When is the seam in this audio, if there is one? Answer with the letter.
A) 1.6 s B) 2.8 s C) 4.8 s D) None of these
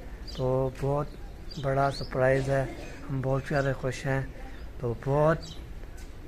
D